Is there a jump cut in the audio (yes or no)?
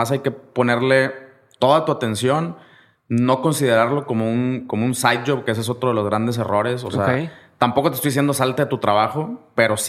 no